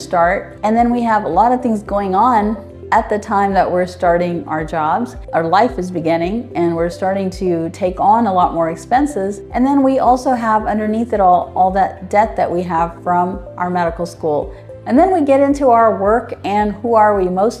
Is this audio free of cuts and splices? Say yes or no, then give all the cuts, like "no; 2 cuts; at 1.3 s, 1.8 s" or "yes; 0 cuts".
yes; 0 cuts